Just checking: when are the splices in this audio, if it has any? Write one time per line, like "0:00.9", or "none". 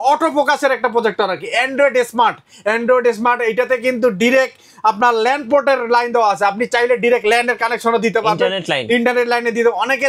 none